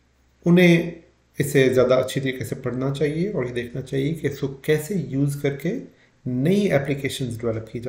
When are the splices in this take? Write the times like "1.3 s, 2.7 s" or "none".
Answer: none